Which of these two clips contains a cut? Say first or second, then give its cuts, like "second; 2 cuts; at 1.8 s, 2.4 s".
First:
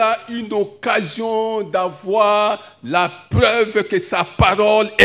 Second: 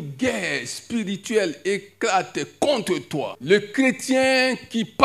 second; 1 cut; at 3.3 s